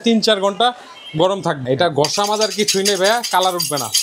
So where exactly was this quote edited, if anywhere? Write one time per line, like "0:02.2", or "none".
0:01.6

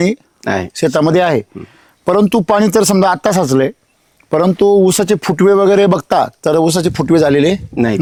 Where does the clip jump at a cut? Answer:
none

